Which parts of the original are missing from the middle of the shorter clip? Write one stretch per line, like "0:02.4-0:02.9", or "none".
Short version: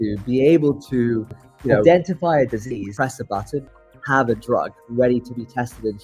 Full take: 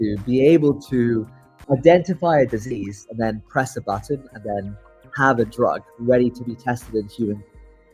0:02.9-0:03.5
0:04.3-0:04.9